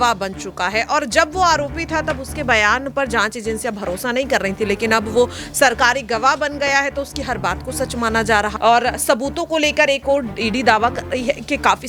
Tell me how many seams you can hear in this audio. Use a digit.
2